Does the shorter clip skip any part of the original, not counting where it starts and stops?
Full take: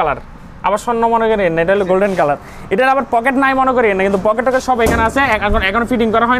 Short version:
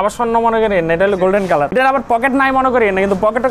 yes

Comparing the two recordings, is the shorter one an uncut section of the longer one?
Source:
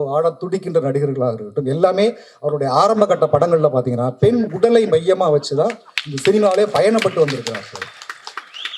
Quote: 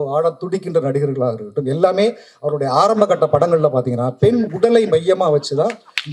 yes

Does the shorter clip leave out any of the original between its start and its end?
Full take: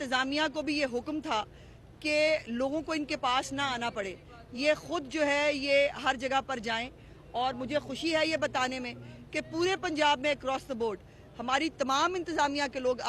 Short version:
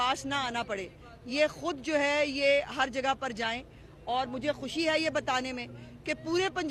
no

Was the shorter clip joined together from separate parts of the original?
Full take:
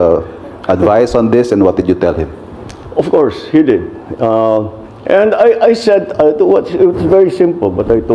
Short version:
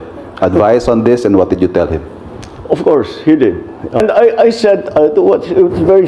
yes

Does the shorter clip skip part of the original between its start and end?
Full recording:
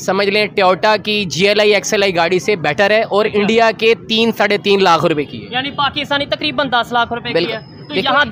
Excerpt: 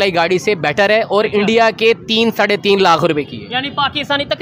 no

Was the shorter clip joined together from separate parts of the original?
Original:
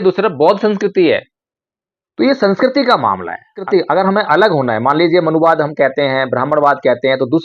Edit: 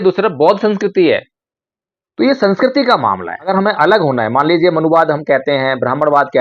yes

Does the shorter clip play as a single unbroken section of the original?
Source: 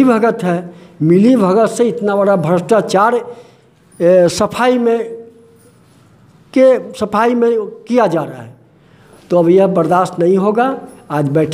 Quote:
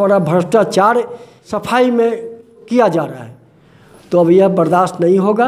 no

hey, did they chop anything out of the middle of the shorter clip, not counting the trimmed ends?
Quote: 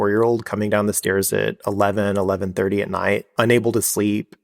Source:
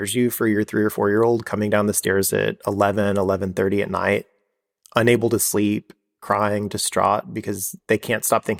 yes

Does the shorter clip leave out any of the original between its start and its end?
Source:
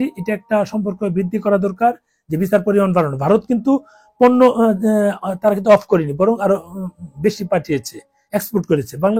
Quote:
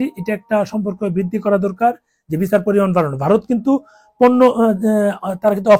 no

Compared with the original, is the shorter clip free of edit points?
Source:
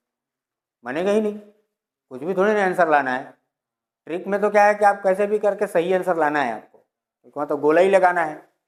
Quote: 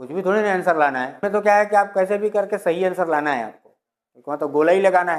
no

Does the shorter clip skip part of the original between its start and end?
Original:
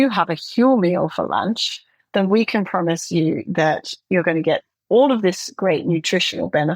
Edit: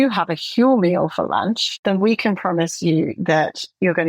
yes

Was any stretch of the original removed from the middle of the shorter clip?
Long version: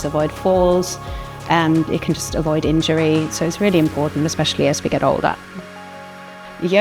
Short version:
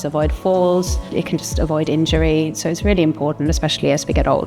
yes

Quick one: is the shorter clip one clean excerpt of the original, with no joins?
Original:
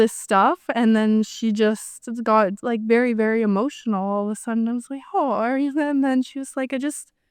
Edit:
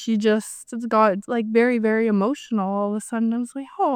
yes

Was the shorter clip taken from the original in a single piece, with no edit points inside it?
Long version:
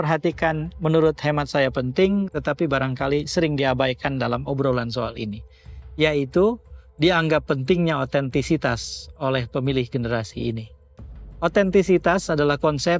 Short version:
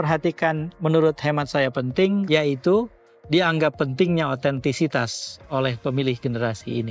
no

